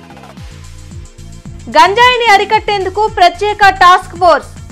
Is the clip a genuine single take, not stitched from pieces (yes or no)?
no